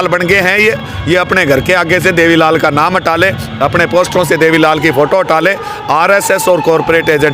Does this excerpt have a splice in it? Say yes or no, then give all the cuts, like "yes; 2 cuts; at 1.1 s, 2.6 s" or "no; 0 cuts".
no; 0 cuts